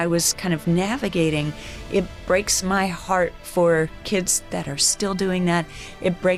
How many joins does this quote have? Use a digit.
0